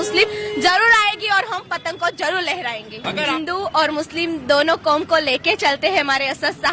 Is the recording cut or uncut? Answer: cut